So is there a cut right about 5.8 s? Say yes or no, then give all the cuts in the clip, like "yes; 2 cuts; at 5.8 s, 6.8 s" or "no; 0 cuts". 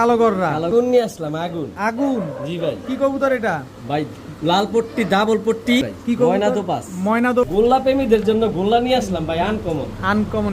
yes; 3 cuts; at 0.7 s, 5.8 s, 7.5 s